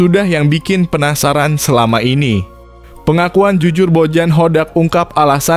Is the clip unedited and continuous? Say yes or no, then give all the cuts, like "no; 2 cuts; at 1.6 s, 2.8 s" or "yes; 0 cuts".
yes; 0 cuts